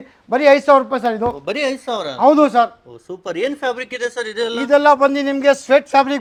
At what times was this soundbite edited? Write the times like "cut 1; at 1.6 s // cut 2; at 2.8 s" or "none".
none